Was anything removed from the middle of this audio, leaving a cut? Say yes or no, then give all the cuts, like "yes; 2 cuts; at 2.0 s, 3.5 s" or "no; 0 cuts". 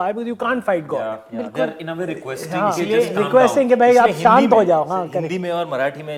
no; 0 cuts